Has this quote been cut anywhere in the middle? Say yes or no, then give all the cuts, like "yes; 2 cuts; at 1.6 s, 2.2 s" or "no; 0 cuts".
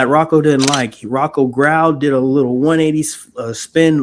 no; 0 cuts